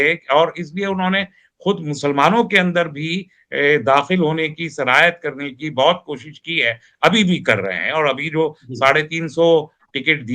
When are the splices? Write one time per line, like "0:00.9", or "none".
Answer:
none